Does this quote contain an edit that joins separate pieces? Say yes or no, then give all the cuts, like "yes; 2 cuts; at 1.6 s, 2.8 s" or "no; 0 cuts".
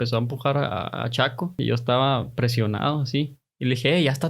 yes; 1 cut; at 1.6 s